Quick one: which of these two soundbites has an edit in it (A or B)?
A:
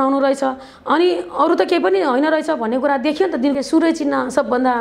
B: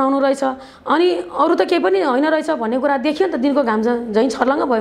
A